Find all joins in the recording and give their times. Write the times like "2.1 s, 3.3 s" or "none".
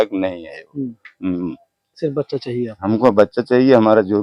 none